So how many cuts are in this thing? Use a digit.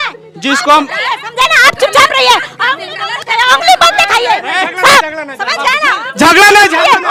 0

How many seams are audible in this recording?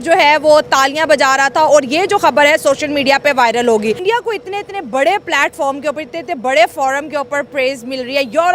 1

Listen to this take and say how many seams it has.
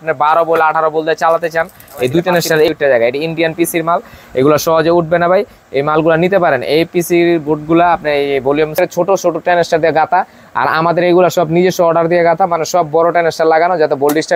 2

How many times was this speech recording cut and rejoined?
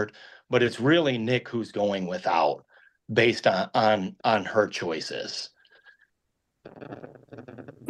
0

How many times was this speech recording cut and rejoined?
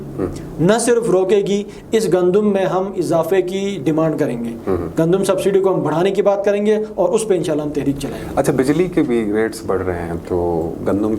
0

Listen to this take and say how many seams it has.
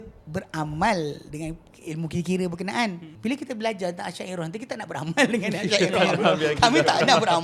1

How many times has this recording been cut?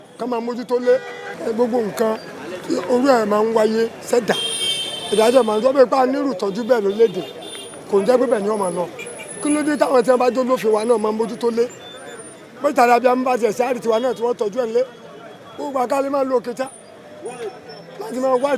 0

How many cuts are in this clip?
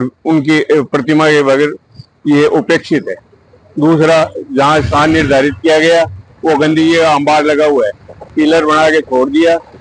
0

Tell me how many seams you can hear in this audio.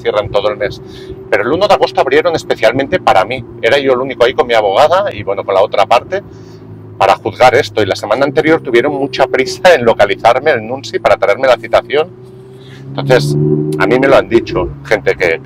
0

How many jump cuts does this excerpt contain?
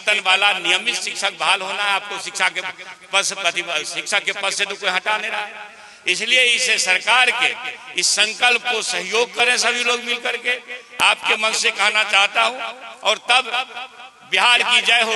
0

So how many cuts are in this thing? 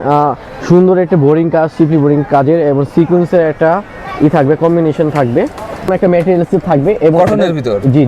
1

